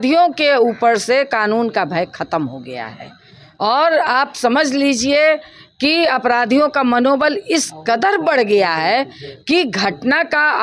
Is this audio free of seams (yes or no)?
yes